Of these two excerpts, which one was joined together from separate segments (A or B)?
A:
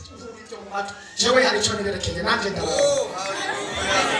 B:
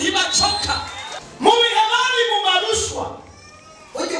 B